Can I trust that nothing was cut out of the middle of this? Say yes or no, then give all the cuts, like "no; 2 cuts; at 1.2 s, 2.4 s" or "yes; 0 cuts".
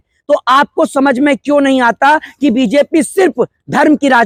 yes; 0 cuts